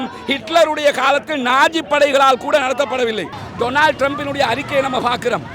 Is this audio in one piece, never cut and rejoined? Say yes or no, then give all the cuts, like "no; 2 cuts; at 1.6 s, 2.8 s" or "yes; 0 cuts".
no; 1 cut; at 3.4 s